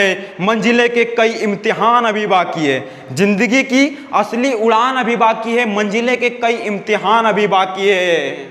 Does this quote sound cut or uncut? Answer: uncut